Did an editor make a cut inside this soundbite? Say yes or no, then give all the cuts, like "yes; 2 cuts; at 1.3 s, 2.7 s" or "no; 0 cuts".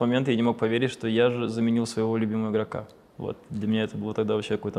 no; 0 cuts